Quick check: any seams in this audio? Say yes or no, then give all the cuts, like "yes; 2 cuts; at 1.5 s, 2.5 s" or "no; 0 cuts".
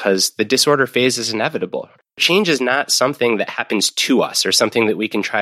yes; 1 cut; at 2.2 s